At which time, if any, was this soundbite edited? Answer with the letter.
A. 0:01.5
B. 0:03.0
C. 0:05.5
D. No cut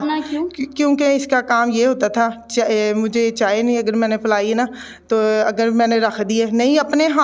D